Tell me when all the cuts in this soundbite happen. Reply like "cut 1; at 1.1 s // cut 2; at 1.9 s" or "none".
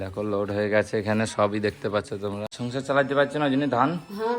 cut 1; at 2.5 s